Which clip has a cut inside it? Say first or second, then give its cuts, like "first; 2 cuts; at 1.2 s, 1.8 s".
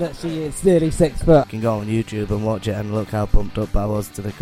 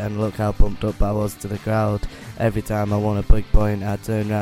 first; 1 cut; at 1.4 s